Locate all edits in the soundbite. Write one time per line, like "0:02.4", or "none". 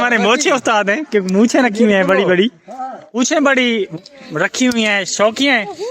0:03.2